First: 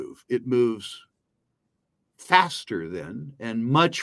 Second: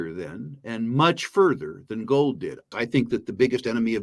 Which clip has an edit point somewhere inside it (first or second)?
second